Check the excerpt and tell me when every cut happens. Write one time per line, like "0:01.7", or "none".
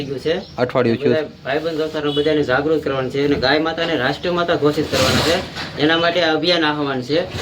none

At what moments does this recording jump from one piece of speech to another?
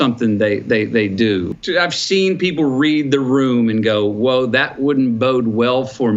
0:01.5

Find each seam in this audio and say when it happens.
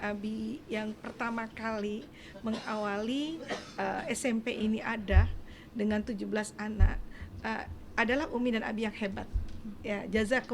none

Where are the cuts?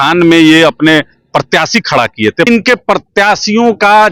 0:02.5

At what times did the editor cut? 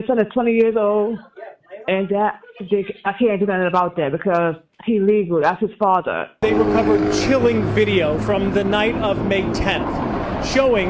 0:06.4

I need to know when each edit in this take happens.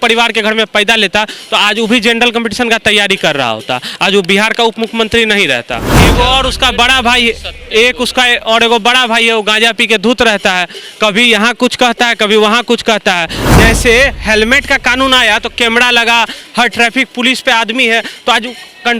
0:06.0
0:13.4

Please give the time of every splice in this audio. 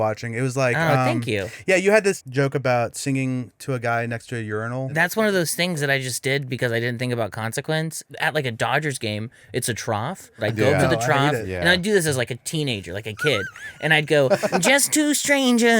0:02.2
0:04.9
0:08.1
0:10.4

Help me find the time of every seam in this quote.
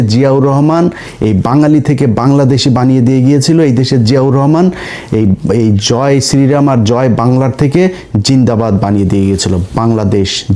none

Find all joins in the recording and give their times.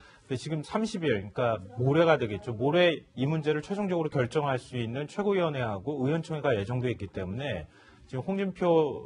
0:01.6

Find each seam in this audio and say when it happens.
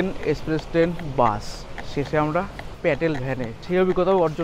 0:02.6
0:03.6

